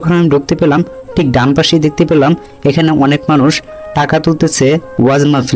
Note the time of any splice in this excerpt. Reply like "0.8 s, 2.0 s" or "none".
none

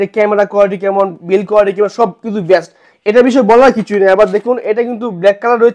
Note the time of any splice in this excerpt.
none

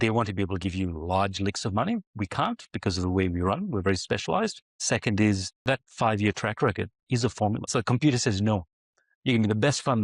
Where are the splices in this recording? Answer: 4.7 s, 5.6 s, 7.7 s

